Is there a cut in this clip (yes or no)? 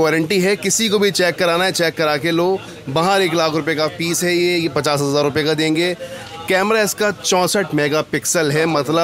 no